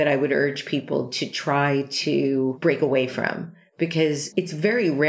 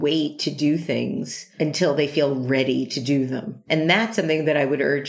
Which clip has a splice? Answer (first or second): second